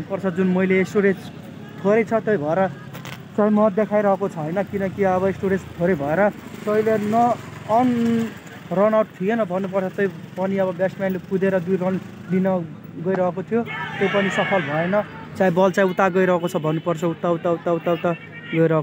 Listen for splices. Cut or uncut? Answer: uncut